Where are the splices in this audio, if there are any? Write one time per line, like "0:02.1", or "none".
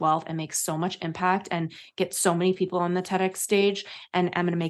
none